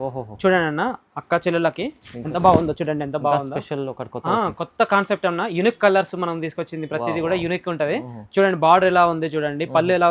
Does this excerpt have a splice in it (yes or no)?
no